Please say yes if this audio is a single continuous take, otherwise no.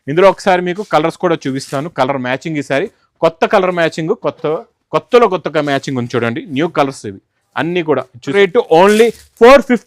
no